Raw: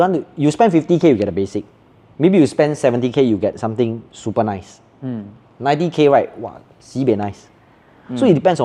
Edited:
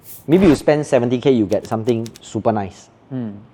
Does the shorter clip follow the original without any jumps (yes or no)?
yes